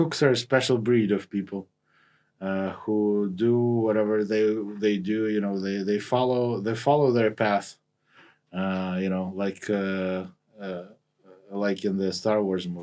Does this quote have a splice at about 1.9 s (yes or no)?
no